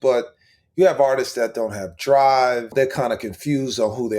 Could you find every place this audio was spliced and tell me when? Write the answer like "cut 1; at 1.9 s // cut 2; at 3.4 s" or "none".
cut 1; at 2.7 s